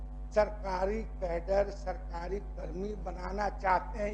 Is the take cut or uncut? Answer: uncut